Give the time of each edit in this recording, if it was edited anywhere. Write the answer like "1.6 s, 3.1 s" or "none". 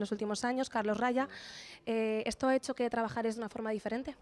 1.7 s